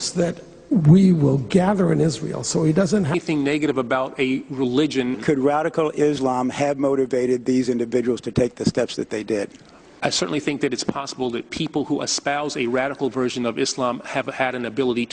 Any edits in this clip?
no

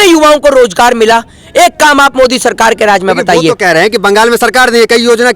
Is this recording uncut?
yes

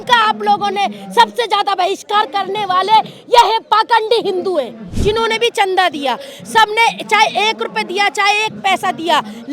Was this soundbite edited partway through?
yes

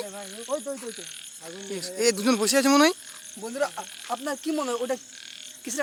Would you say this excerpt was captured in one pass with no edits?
yes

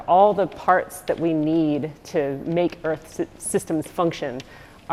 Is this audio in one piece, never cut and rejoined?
yes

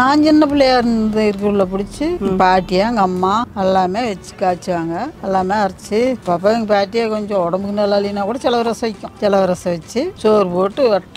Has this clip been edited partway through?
yes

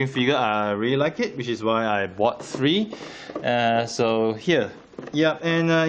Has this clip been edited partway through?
yes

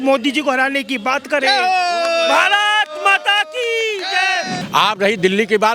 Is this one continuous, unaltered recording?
no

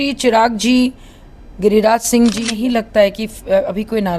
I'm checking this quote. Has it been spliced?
yes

